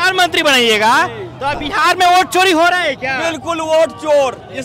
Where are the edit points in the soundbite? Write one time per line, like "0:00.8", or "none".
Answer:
0:01.6